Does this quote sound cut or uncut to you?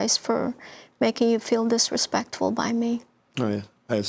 uncut